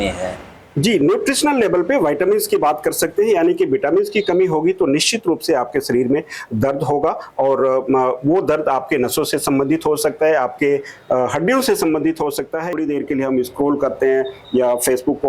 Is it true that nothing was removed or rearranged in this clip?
no; 1 cut; at 12.6 s

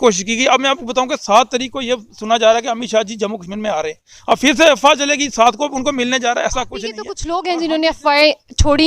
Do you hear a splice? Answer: yes; 1 cut; at 7.1 s

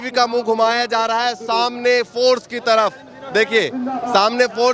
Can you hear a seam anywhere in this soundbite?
no; 0 cuts

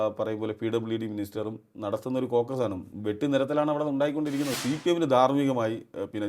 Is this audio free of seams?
no; 1 cut; at 4.6 s

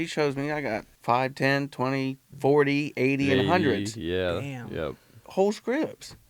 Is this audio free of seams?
no; 2 cuts; at 0.9 s, 2.3 s

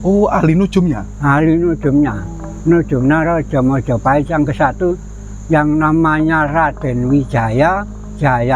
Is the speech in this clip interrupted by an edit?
no; 0 cuts

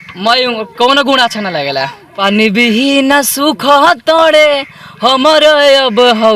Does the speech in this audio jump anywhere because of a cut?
yes; 1 cut; at 2.0 s

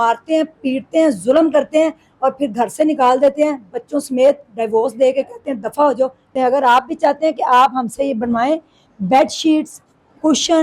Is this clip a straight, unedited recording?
no; 1 cut; at 6.3 s

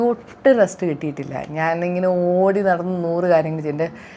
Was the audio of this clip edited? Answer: no; 0 cuts

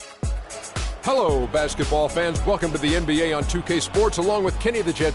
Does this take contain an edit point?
yes; 1 cut; at 1.0 s

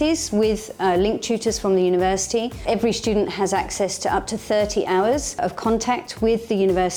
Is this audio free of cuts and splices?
yes; 0 cuts

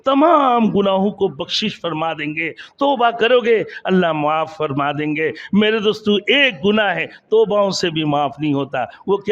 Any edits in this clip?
no; 0 cuts

